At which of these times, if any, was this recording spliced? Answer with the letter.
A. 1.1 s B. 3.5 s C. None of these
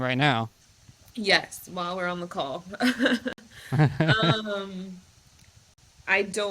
C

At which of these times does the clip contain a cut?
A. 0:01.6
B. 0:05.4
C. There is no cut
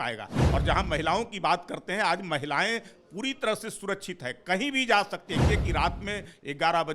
B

